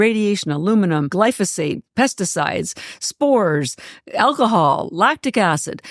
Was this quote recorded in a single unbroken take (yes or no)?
no